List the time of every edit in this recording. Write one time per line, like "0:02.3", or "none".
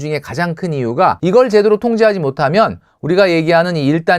0:01.2